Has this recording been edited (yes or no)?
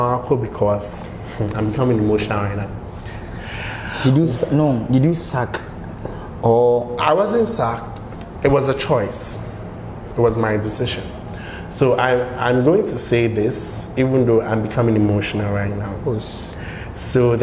no